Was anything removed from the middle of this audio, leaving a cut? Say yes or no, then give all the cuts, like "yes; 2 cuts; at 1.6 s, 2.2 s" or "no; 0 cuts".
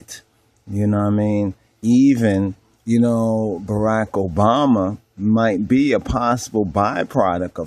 yes; 1 cut; at 2.0 s